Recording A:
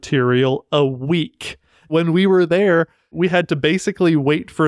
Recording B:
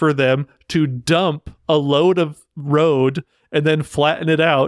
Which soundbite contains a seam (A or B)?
A